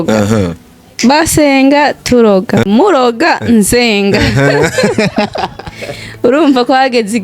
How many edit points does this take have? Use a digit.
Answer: 1